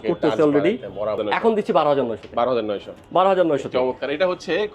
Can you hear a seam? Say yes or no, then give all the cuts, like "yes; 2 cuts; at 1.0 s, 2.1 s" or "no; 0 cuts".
yes; 1 cut; at 1.2 s